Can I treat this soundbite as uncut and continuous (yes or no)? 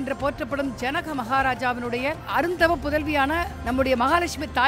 no